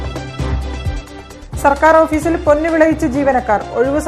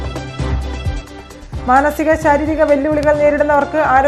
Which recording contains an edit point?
first; 1 cut; at 1.0 s

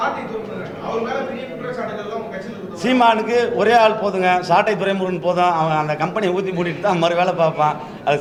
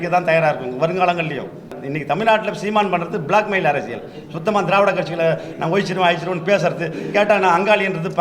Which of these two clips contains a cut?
second; 1 cut; at 1.8 s

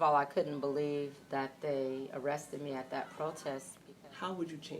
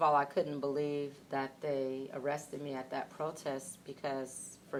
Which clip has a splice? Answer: first; 1 cut; at 3.8 s

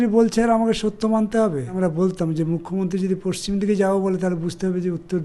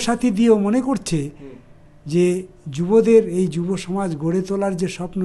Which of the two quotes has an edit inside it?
first; 1 cut; at 1.8 s

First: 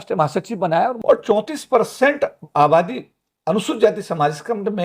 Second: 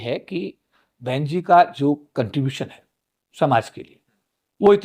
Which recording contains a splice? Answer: first; 1 cut; at 1.0 s

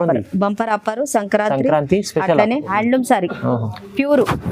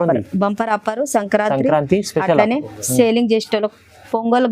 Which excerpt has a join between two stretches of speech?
first; 1 cut; at 2.7 s

